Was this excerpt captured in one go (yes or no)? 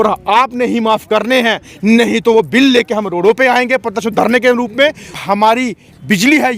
no